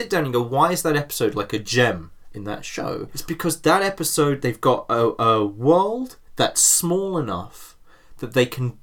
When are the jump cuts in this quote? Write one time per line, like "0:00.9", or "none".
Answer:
0:03.1